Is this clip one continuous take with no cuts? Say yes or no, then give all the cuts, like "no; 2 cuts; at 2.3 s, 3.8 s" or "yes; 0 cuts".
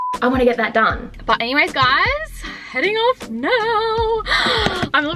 no; 1 cut; at 1.2 s